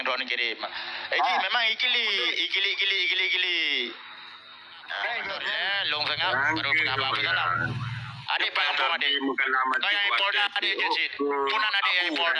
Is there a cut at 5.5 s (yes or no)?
yes